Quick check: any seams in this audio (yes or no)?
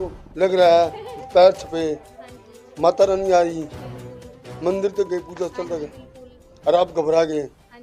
no